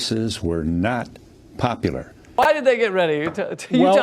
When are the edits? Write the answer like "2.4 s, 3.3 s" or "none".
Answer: 2.4 s